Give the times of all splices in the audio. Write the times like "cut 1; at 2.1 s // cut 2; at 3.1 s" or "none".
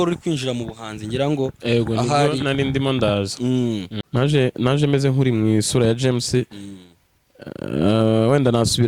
cut 1; at 4.0 s